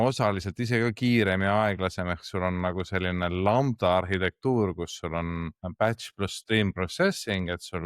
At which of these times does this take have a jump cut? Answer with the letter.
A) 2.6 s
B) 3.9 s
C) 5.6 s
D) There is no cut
C